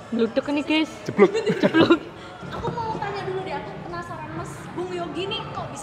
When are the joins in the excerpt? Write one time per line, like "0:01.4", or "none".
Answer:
0:02.3